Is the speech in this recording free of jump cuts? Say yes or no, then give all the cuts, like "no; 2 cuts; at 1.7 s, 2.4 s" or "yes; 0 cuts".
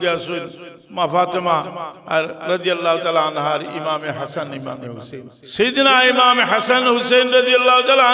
no; 1 cut; at 5.3 s